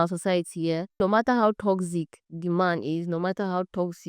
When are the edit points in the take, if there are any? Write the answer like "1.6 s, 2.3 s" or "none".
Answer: 1.0 s